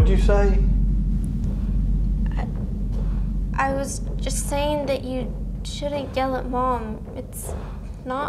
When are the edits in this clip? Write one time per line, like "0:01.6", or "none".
none